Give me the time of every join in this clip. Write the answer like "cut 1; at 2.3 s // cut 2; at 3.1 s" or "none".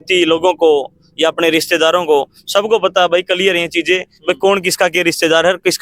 none